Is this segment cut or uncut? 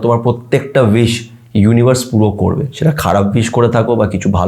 uncut